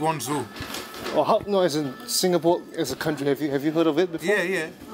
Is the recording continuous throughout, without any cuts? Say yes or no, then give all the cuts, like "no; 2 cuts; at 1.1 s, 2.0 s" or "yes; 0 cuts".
yes; 0 cuts